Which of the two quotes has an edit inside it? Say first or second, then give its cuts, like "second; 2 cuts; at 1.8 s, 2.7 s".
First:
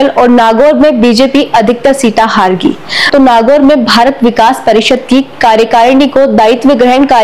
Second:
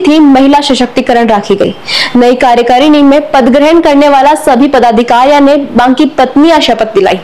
first; 1 cut; at 3.0 s